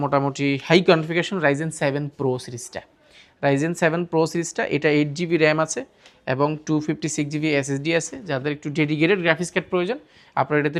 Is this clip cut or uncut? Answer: uncut